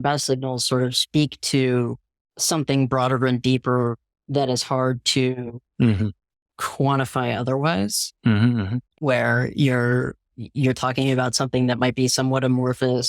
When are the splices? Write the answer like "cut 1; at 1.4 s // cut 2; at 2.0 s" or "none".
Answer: cut 1; at 8.8 s